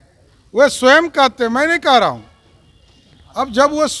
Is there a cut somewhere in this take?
no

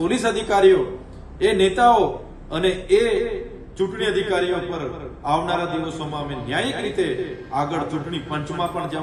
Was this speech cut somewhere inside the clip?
no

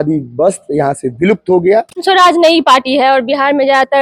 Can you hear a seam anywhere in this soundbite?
yes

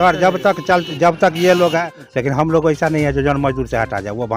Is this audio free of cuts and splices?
no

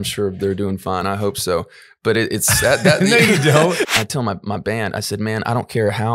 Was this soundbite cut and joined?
yes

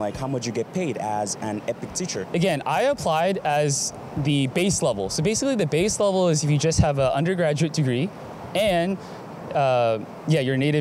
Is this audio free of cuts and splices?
yes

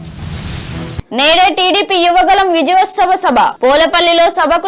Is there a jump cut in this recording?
yes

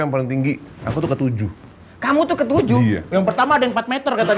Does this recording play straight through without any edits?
yes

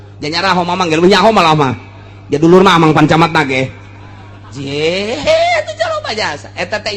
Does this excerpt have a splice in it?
no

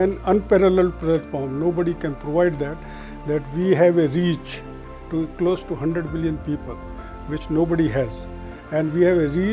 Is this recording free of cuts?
yes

